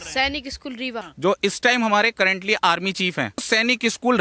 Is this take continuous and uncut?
no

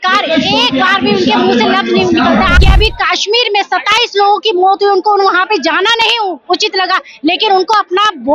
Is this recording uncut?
no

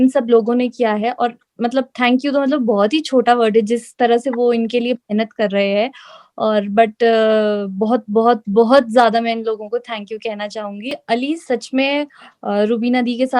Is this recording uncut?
no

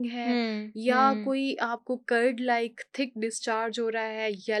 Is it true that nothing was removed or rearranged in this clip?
yes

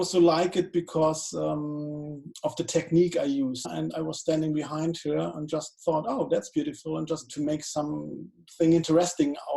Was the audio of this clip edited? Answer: yes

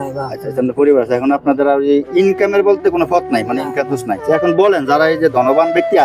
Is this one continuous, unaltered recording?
no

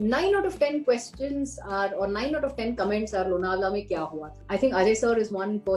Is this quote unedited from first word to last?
no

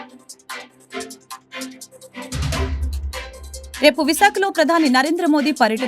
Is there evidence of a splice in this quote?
yes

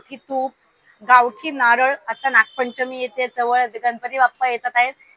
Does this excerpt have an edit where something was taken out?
no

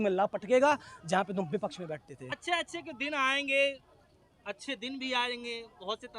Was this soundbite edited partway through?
no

